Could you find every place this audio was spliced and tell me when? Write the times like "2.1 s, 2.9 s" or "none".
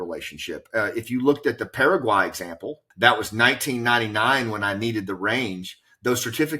2.8 s